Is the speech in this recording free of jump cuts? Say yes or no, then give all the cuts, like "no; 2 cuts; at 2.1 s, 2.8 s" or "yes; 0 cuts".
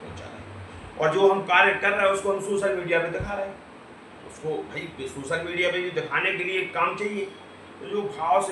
yes; 0 cuts